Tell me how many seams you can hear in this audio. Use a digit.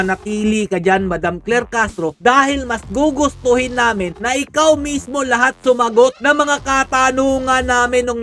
1